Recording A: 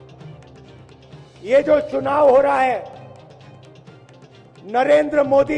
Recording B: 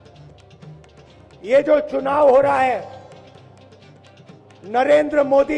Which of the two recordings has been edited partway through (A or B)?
B